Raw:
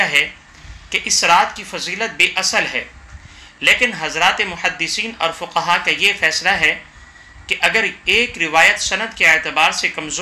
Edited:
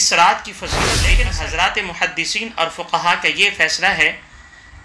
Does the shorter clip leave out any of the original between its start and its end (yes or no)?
yes